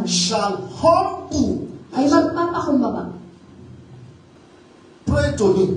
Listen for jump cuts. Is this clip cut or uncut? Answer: cut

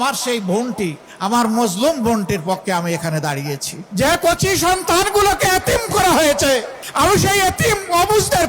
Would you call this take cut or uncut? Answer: cut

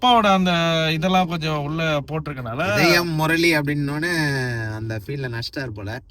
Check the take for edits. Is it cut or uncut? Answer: uncut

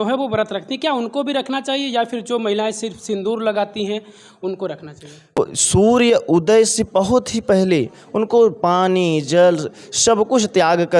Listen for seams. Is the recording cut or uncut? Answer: cut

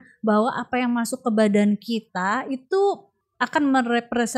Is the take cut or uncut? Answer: cut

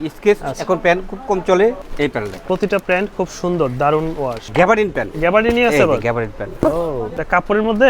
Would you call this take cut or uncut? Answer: cut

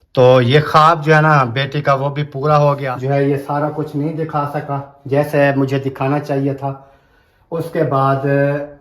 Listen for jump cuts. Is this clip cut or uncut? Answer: cut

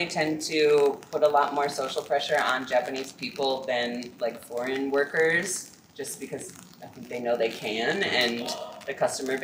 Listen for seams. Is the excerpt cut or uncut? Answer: uncut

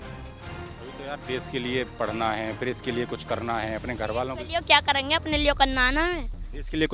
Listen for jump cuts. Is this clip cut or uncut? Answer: uncut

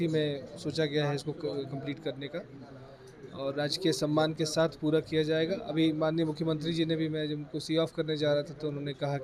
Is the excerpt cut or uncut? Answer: uncut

